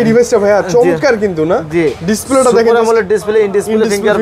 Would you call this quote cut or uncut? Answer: uncut